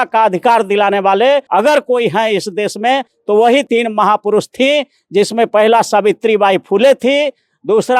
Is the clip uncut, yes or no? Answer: no